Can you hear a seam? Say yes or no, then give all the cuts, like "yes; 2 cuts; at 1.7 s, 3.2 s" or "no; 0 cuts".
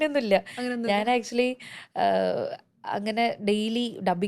no; 0 cuts